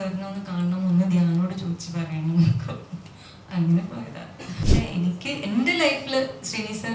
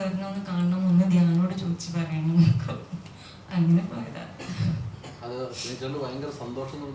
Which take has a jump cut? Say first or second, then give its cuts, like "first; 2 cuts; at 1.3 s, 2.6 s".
first; 1 cut; at 4.6 s